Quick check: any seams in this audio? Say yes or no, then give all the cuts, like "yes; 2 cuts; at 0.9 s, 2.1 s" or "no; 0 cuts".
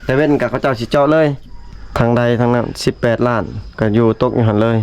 yes; 1 cut; at 2.0 s